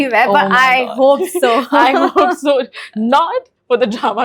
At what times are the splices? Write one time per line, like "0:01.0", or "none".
none